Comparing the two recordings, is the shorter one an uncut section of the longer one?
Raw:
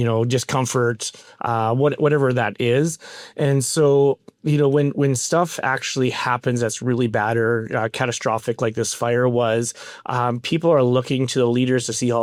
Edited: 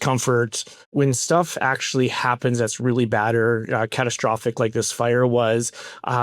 no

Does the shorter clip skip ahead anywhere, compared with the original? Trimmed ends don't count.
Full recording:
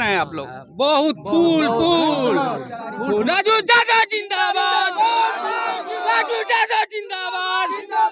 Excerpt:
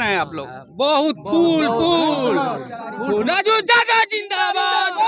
no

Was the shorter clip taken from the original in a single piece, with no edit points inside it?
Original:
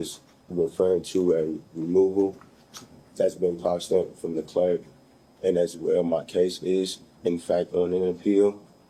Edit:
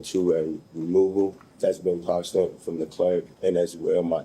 no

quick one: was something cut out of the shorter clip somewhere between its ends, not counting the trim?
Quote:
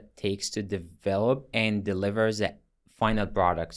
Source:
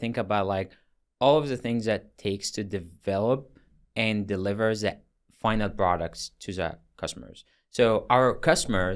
yes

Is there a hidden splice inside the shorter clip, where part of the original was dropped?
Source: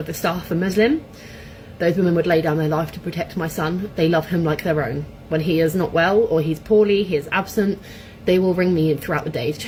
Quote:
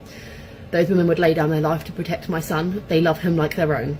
no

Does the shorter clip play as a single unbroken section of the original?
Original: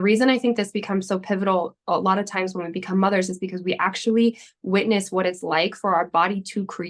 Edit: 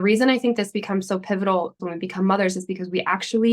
no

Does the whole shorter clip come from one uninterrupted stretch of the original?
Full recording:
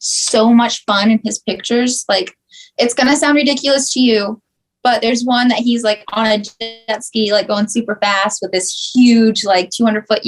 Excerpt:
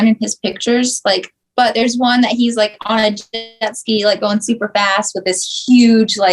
no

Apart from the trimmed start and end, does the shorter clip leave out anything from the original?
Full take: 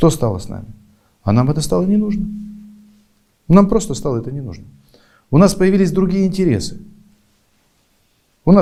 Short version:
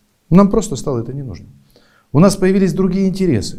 no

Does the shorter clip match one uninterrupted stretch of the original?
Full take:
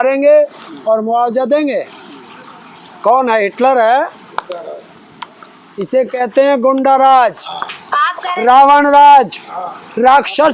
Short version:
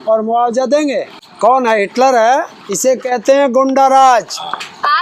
no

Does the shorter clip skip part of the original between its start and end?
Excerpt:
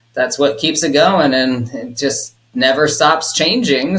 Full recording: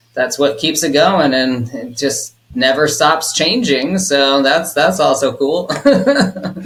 no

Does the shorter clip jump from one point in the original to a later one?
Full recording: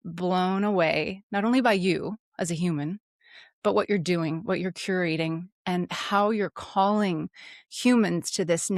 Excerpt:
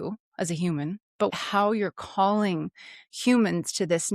yes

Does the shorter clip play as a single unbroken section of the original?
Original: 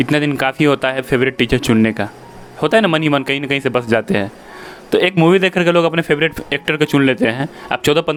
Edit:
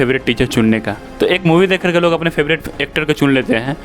no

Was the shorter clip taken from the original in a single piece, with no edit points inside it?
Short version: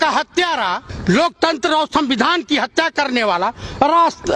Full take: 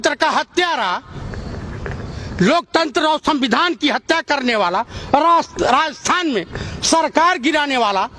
no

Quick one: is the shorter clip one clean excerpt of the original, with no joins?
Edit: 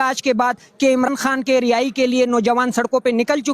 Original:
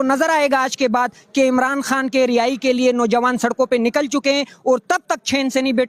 no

